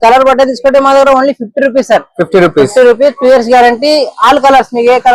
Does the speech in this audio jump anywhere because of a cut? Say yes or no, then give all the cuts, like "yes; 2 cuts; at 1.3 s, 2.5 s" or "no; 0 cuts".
no; 0 cuts